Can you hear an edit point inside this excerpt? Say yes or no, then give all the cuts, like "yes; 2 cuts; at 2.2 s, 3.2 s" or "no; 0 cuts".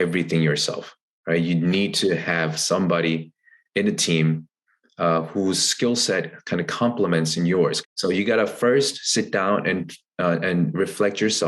yes; 1 cut; at 7.8 s